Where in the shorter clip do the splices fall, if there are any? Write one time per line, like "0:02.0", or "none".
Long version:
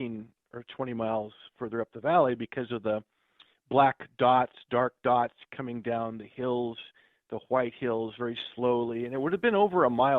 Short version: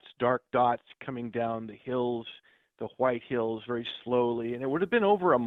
none